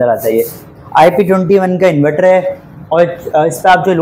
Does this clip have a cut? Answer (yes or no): no